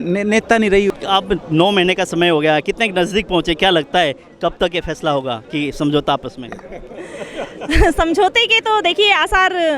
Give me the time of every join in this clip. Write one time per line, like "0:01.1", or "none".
0:00.9